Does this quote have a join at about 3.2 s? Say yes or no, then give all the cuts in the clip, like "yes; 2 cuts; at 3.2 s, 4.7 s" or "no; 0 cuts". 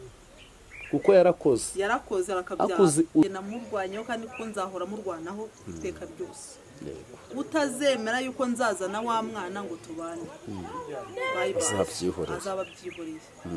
yes; 1 cut; at 3.2 s